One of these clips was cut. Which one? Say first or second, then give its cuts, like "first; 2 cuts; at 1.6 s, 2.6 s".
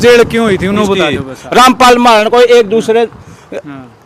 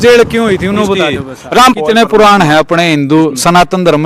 second; 1 cut; at 1.8 s